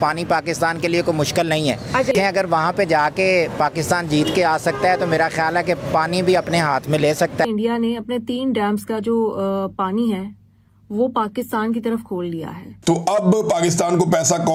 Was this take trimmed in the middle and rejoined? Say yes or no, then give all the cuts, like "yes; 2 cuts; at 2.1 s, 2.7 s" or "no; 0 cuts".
no; 0 cuts